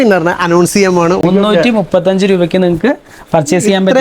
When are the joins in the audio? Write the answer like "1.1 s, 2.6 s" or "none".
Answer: 1.2 s